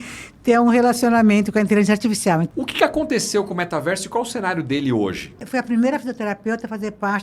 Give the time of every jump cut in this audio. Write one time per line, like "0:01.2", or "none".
0:02.5
0:05.4